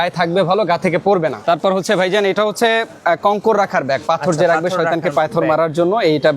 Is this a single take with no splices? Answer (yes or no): no